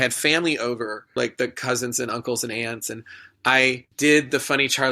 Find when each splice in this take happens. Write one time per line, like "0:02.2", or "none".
0:01.2
0:03.9